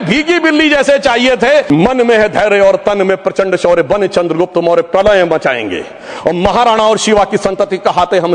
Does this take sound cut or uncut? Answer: cut